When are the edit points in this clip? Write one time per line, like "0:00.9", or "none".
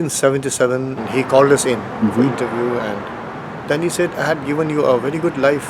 0:01.0